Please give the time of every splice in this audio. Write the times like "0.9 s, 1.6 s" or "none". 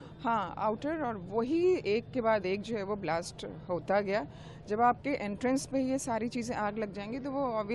none